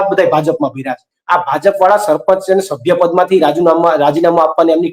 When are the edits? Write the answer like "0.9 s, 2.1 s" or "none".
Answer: 1.1 s